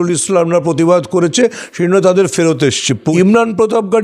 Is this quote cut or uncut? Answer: cut